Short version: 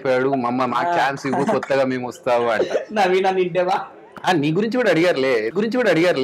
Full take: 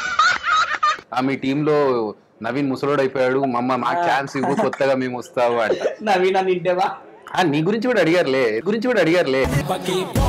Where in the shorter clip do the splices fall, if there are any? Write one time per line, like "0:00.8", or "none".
none